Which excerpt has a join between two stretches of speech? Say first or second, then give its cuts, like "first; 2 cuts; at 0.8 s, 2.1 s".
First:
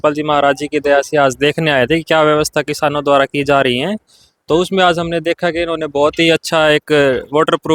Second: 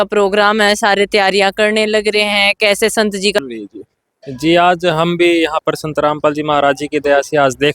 second; 1 cut; at 3.4 s